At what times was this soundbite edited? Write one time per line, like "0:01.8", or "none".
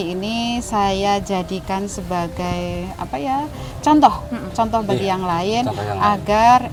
none

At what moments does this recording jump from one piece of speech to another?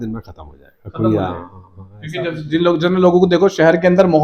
none

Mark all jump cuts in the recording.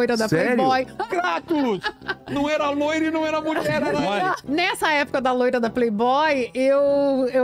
0:00.9
0:04.4

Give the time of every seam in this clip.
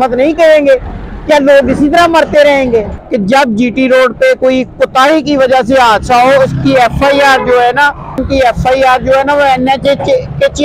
0:03.0
0:08.2

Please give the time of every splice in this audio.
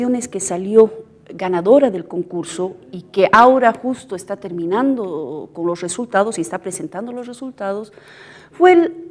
0:01.8

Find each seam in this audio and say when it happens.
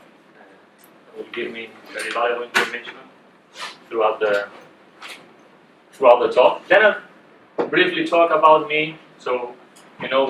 0:06.4

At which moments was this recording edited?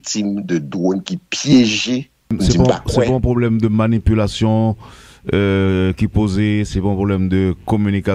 0:02.3

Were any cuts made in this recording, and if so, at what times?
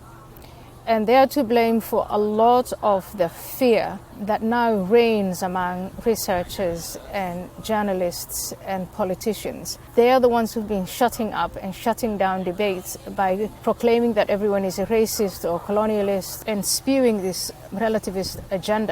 0:04.1
0:09.8
0:13.6
0:16.4
0:17.6

